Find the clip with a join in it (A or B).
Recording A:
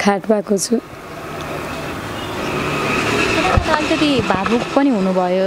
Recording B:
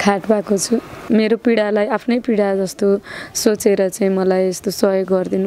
B